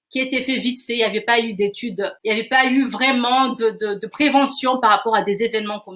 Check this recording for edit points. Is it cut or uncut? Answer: cut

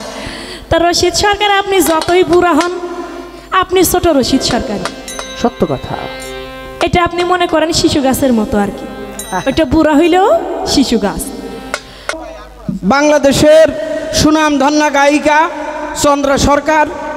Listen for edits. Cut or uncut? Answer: cut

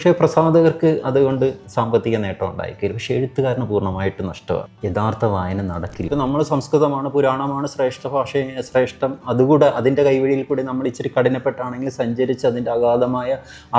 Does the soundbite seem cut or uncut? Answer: cut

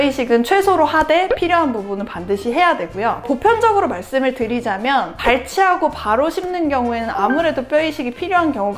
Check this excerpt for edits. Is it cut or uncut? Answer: cut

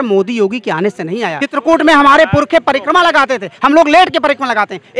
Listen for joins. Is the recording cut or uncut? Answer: cut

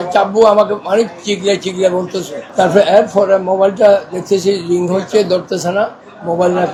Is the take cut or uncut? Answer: uncut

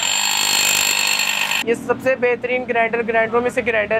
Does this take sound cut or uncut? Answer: cut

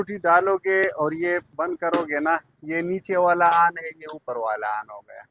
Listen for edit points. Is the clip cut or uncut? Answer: uncut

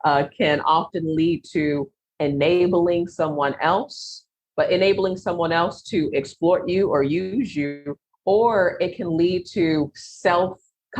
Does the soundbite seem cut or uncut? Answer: cut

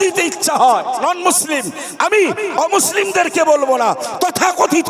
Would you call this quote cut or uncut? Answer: cut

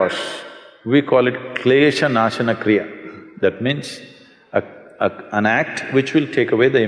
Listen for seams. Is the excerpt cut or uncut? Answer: uncut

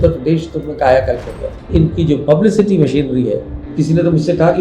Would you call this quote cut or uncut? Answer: cut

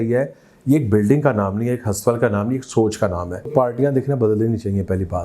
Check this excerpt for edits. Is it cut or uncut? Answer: cut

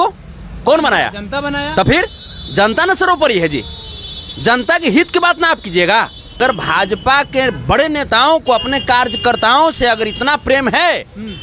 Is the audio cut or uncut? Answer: cut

